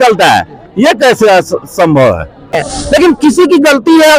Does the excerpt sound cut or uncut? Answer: cut